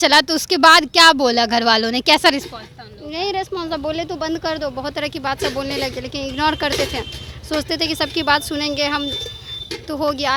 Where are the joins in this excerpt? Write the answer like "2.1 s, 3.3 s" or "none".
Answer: none